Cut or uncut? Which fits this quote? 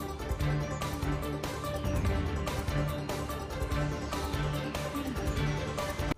uncut